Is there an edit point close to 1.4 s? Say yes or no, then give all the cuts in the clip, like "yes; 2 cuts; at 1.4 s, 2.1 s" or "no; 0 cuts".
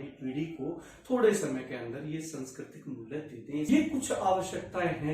no; 1 cut; at 3.7 s